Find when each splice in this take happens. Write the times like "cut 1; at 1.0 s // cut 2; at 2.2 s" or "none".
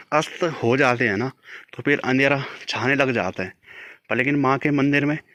none